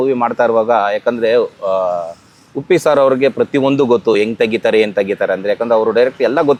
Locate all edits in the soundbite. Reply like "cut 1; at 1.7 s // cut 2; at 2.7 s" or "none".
none